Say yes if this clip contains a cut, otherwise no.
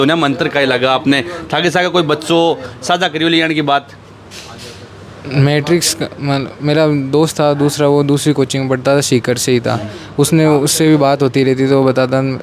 no